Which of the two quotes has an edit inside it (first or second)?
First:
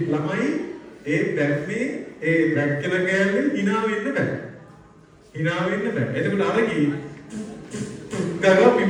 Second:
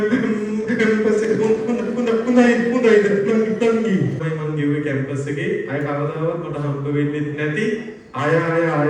second